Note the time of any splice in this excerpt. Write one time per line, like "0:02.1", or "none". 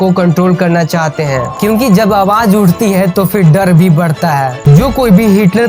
0:01.5
0:04.6